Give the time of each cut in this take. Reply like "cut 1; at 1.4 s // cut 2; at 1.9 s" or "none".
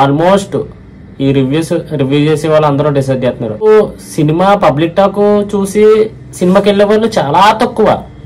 cut 1; at 3.6 s